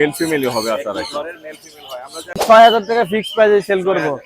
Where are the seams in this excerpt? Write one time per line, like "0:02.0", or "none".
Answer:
0:02.4